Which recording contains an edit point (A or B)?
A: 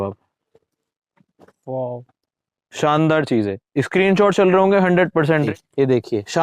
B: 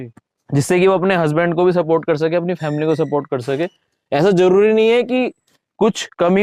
A